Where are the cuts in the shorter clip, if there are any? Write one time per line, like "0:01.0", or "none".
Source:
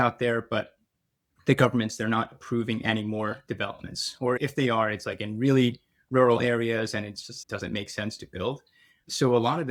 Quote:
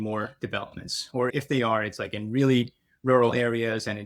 none